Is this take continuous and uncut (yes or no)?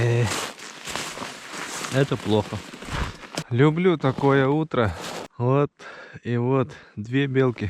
no